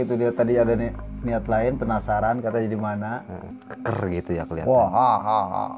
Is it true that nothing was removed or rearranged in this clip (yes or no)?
no